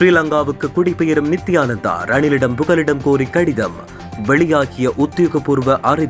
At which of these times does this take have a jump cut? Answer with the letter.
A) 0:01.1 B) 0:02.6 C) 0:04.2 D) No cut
D